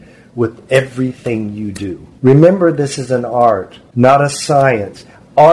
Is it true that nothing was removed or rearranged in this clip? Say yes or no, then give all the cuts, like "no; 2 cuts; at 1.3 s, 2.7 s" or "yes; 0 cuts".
no; 2 cuts; at 2.0 s, 3.8 s